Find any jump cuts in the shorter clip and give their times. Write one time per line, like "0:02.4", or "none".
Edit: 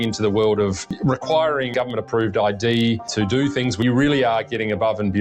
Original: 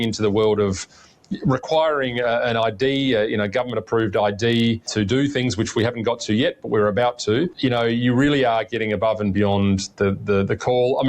0:00.9
0:01.7
0:03.8

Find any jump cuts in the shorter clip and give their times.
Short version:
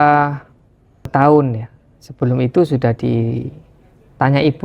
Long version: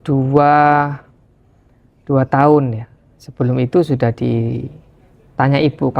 0:01.1

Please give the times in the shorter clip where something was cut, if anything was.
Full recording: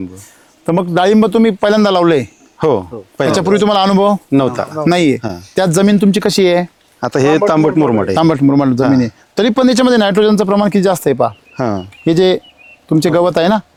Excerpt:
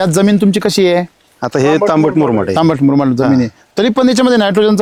none

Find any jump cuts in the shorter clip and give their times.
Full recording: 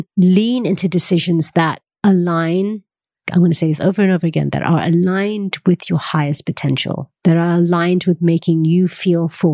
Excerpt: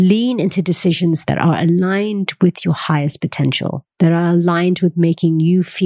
0:01.2

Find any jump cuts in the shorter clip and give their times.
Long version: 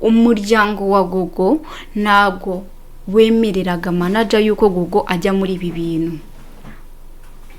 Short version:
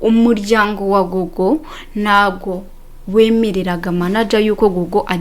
none

